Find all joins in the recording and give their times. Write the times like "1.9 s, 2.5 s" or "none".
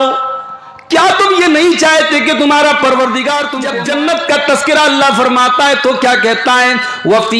3.6 s